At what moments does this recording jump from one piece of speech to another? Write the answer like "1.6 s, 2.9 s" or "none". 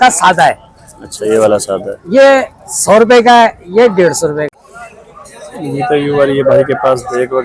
4.5 s